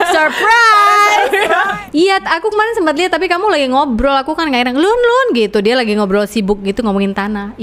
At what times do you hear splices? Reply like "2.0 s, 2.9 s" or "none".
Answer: 1.7 s